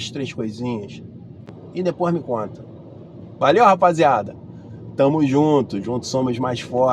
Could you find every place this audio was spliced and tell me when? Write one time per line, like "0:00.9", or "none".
0:01.5